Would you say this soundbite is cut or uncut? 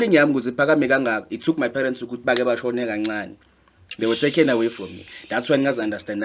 uncut